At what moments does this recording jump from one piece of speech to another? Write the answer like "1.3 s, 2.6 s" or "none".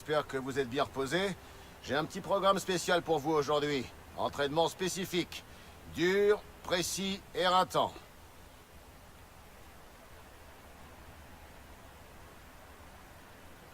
5.4 s